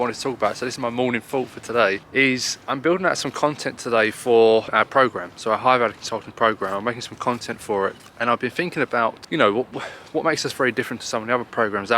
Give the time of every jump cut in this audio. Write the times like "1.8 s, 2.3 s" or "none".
2.0 s, 4.7 s, 8.1 s, 9.2 s